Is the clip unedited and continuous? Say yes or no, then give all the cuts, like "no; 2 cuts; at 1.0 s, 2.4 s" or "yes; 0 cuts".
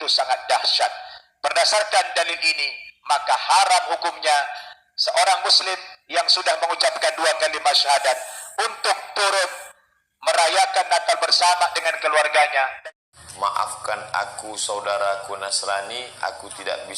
no; 1 cut; at 12.8 s